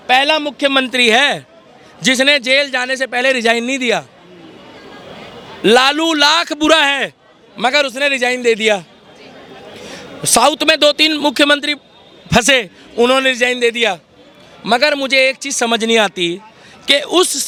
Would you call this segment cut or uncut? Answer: uncut